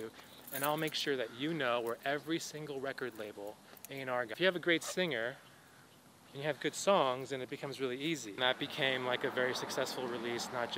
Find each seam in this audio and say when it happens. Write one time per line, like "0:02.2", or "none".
0:04.3
0:08.4